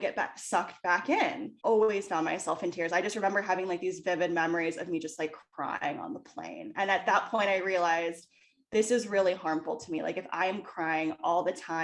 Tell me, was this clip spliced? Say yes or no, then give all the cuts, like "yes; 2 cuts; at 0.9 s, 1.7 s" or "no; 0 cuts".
yes; 1 cut; at 1.5 s